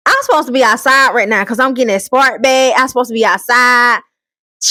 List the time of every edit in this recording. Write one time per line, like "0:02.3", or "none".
none